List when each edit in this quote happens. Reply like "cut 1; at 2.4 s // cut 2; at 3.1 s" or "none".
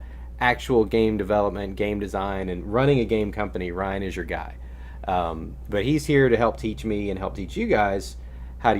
cut 1; at 2.2 s